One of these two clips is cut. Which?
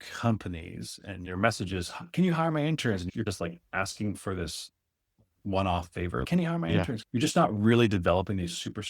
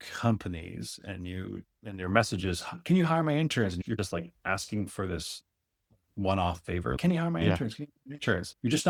first; 2 cuts; at 1.2 s, 7.0 s

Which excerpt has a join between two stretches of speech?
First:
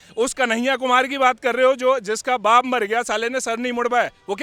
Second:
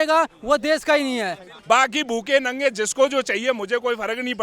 second; 1 cut; at 1.5 s

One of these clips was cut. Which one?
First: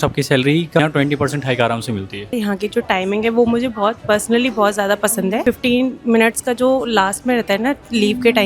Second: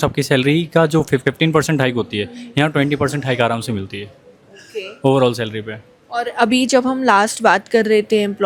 first; 3 cuts; at 0.8 s, 2.3 s, 5.4 s

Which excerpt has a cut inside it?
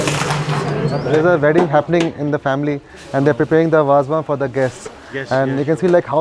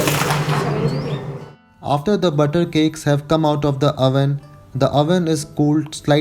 first; 1 cut; at 1.0 s

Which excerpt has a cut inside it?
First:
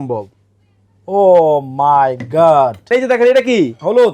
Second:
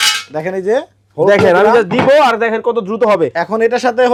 first; 1 cut; at 2.9 s

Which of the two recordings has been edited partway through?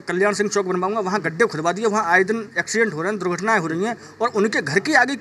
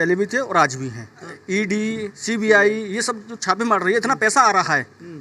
second; 1 cut; at 1.3 s

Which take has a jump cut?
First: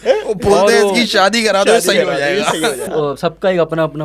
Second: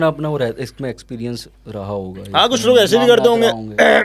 first; 1 cut; at 2.9 s

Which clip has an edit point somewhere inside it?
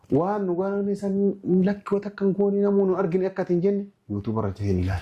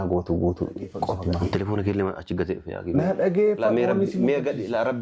second; 1 cut; at 1.2 s

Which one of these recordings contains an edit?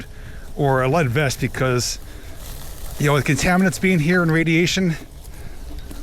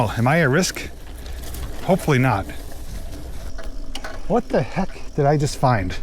second; 1 cut; at 3.1 s

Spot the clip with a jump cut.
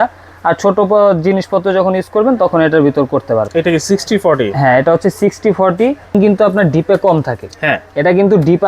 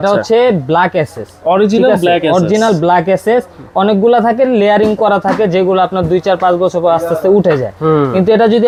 first; 2 cuts; at 3.5 s, 6.1 s

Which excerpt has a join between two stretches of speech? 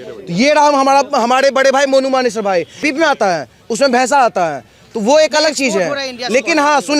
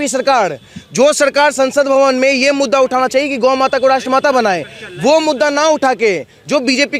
first; 1 cut; at 2.9 s

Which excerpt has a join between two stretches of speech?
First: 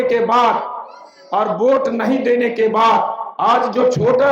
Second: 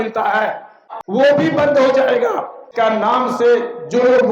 second; 2 cuts; at 0.9 s, 2.7 s

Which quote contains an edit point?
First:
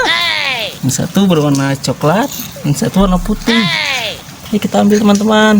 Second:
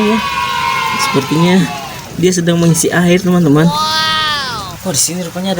second; 1 cut; at 4.7 s

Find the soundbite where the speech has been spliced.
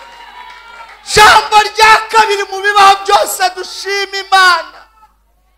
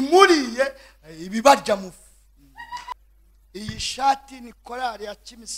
second; 1 cut; at 2.9 s

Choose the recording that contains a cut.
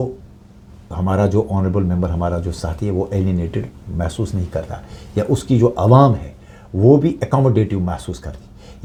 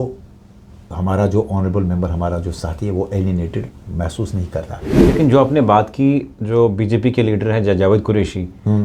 second; 1 cut; at 4.9 s

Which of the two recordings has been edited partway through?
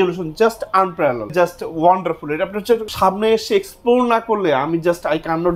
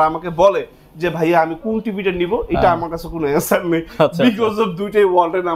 first; 2 cuts; at 1.3 s, 2.9 s

